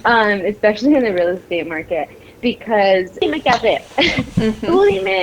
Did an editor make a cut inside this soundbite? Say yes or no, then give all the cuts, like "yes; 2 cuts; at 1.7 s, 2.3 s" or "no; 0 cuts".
yes; 1 cut; at 3.2 s